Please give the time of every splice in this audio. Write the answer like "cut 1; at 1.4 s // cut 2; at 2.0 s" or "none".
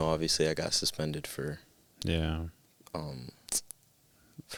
none